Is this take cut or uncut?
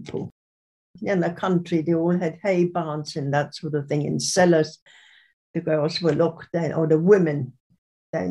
cut